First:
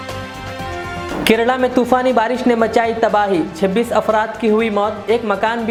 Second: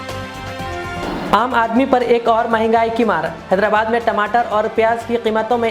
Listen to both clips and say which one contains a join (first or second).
second